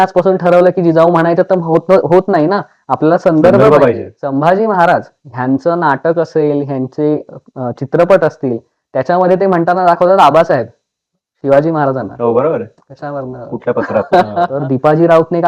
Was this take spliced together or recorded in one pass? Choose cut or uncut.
cut